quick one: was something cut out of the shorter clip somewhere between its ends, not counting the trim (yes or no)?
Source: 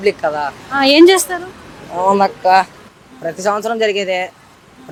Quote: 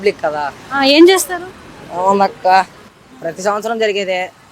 no